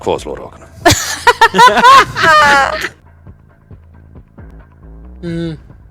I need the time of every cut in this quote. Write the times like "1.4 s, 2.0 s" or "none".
3.0 s